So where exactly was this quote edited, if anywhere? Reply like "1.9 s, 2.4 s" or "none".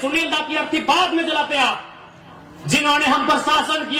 none